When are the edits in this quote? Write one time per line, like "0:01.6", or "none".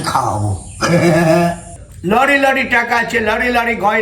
0:01.7

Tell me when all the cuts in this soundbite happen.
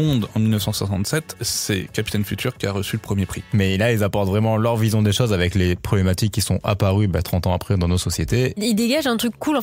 0:03.4
0:08.6

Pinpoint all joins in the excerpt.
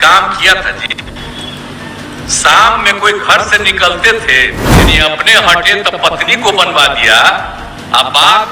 0:04.9

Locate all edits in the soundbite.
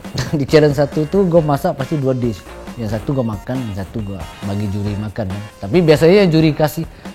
none

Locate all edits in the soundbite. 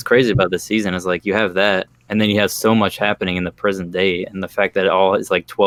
none

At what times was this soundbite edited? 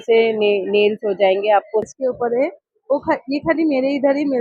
0:01.9

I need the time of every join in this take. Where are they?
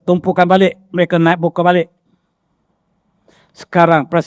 none

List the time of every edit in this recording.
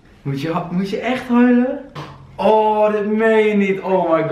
none

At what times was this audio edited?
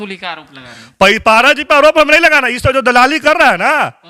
none

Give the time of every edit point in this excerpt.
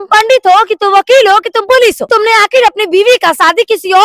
0:02.0

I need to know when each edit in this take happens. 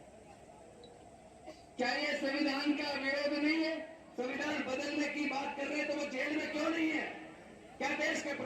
0:04.0

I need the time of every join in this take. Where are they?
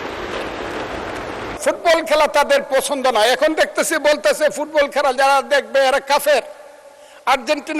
0:01.6

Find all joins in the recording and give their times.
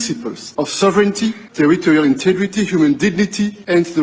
none

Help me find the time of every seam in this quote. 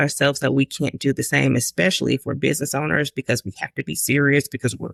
none

